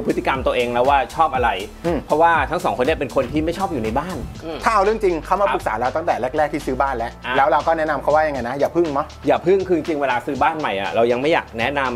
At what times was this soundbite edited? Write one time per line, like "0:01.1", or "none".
none